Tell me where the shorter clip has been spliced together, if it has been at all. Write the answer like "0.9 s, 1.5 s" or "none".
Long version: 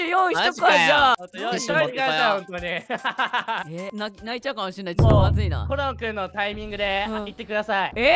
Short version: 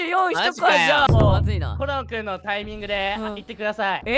1.1 s